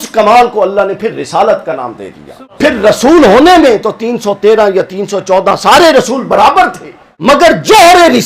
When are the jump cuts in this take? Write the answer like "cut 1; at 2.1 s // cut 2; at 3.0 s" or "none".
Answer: cut 1; at 2.4 s // cut 2; at 7.0 s